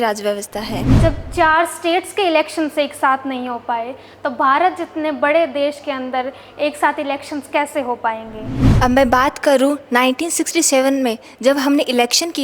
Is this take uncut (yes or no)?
no